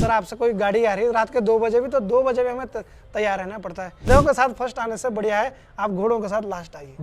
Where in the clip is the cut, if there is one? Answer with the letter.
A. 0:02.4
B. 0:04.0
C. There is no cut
B